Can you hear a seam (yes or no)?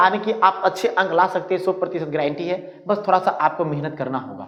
no